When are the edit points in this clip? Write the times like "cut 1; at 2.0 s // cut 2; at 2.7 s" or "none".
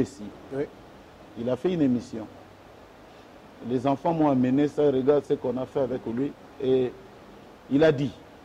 none